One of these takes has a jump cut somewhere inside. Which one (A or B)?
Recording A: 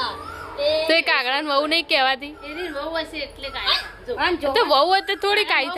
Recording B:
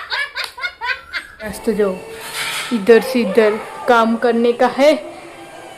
B